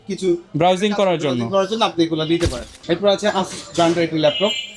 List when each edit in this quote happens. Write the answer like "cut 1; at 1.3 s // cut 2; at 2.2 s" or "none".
cut 1; at 2.7 s